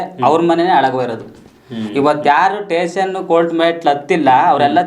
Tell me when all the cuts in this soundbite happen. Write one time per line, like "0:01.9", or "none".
none